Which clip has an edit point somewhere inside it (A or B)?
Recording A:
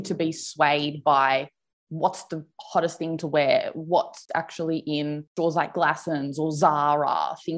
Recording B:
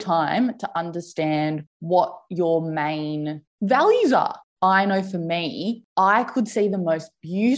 B